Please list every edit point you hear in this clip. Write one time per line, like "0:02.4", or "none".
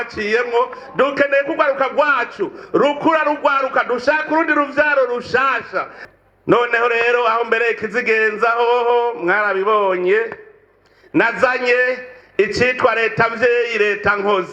0:06.0